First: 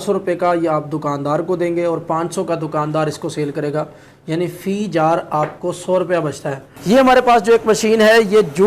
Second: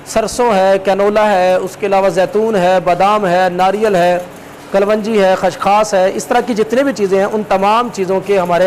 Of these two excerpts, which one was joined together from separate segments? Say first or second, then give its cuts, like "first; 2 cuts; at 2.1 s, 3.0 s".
first; 1 cut; at 6.7 s